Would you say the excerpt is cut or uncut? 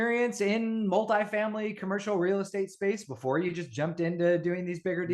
uncut